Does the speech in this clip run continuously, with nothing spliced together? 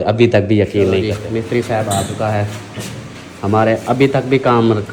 no; 1 cut; at 1.1 s

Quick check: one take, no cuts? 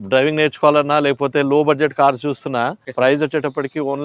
no; 1 cut; at 2.8 s

